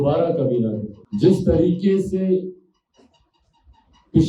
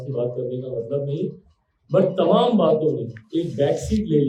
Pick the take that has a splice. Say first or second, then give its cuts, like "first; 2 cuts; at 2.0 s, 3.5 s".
first; 1 cut; at 0.9 s